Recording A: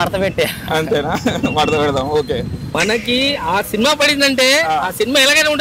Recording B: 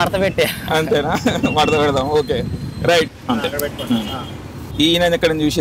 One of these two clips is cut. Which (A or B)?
A